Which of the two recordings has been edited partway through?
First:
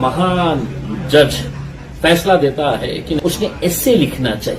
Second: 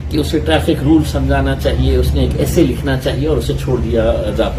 first; 1 cut; at 3.1 s

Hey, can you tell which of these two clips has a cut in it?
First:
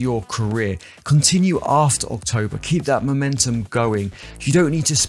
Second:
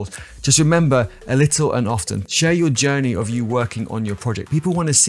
second; 1 cut; at 2.2 s

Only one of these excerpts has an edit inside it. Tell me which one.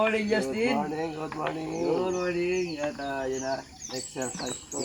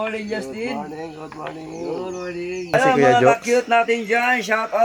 second; 1 cut; at 2.7 s

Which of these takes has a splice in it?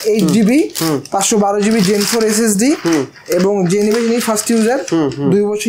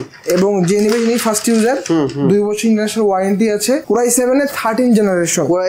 second; 1 cut; at 3.8 s

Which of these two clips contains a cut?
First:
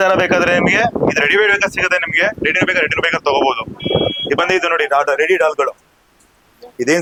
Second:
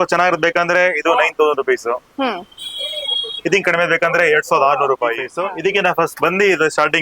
second; 1 cut; at 5.3 s

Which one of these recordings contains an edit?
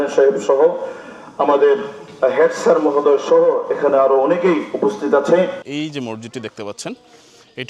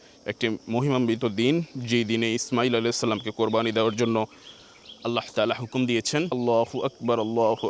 first; 1 cut; at 5.6 s

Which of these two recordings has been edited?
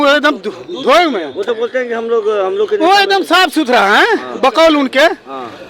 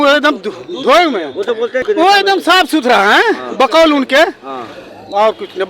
second; 1 cut; at 1.8 s

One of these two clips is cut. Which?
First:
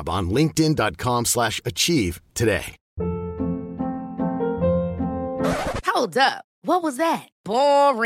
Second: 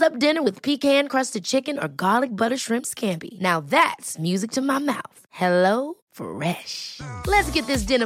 first; 1 cut; at 2.8 s

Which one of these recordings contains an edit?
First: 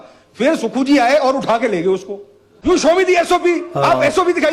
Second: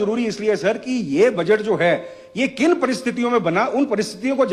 first; 1 cut; at 2.5 s

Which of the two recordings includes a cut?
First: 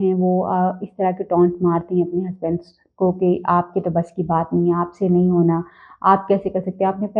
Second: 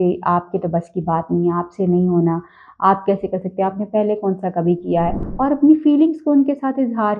second; 1 cut; at 5.2 s

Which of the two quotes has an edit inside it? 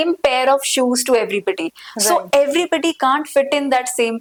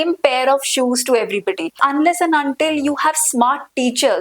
second; 1 cut; at 1.8 s

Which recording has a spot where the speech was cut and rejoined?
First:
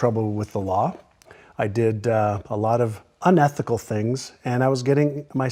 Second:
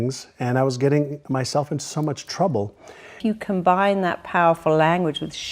second; 1 cut; at 3.2 s

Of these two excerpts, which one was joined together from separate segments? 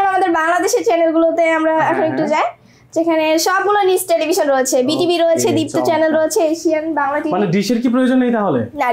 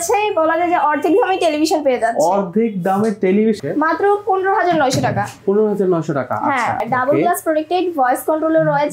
second; 2 cuts; at 3.6 s, 6.8 s

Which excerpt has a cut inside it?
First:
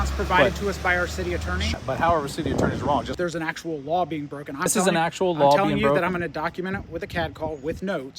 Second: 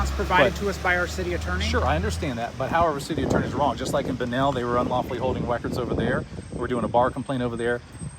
first; 3 cuts; at 1.7 s, 3.1 s, 4.7 s

